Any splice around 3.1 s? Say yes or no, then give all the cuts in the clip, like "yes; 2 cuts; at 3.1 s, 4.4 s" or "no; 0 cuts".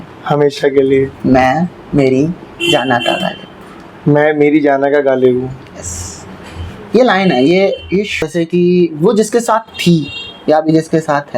no; 1 cut; at 8.3 s